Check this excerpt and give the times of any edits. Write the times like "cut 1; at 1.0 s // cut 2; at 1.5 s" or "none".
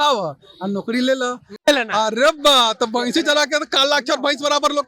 cut 1; at 1.5 s